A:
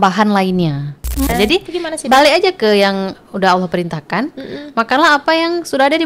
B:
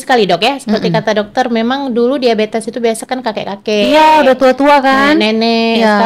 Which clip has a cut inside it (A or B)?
A